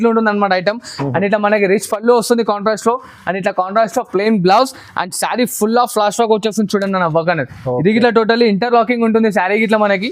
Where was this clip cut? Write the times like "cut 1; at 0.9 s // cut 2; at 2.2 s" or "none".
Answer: none